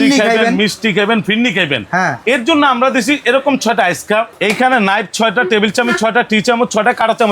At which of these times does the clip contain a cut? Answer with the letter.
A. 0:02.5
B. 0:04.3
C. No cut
B